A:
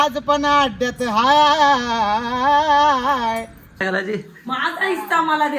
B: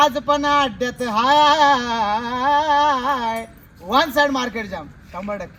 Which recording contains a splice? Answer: A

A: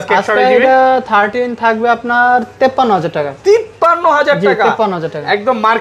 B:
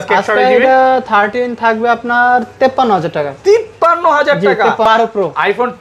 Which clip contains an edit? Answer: B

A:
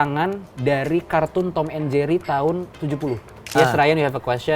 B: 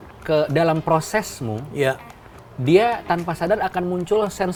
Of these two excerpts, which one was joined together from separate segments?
A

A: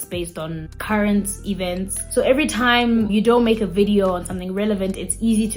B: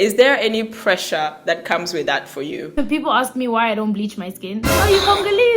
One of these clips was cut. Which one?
B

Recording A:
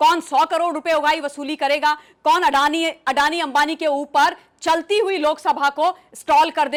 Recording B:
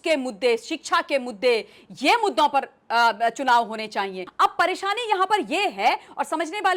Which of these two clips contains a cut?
B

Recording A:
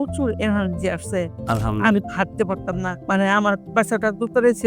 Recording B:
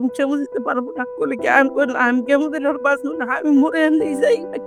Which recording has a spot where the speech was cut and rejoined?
A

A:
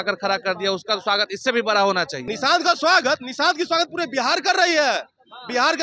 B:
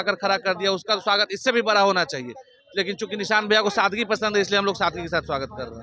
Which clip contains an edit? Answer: A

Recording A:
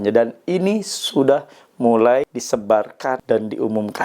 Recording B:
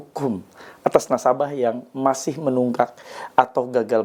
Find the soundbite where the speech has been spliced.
A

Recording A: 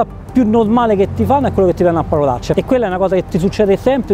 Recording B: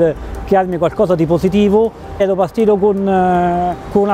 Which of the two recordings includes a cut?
B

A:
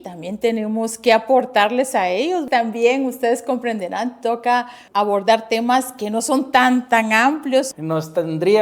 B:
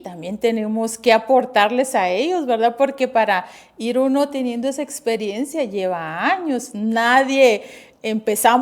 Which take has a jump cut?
A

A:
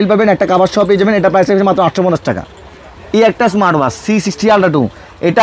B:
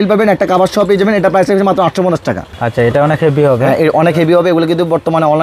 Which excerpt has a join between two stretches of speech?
B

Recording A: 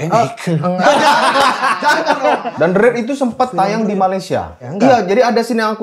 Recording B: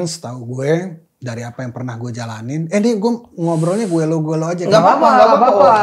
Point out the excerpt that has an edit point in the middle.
A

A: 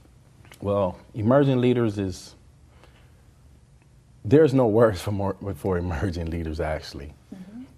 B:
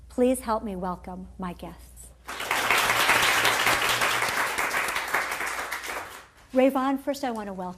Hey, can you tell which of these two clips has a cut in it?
B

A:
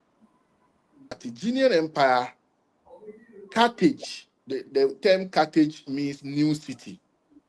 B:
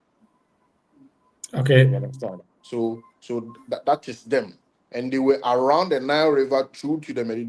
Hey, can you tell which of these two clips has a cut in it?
A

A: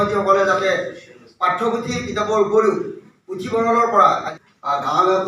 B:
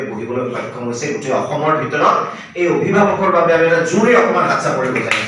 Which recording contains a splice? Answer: A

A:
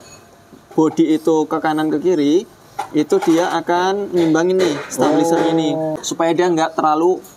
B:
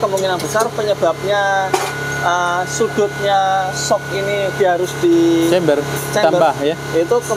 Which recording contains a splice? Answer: A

